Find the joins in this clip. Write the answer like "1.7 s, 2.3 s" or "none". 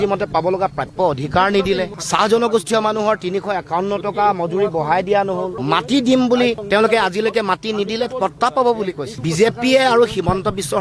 9.1 s